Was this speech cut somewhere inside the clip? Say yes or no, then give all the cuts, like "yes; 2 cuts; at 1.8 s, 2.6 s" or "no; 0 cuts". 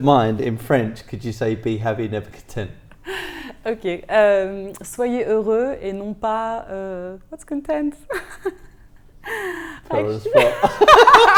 no; 0 cuts